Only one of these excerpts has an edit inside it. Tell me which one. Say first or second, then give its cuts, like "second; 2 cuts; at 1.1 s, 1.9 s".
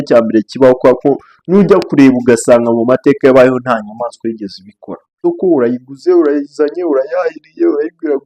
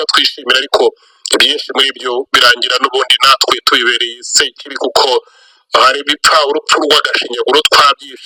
first; 1 cut; at 5.1 s